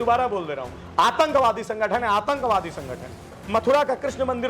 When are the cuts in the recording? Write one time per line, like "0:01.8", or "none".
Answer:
0:03.4